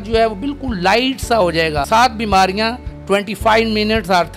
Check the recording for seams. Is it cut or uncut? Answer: cut